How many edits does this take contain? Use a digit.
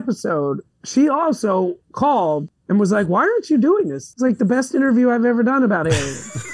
2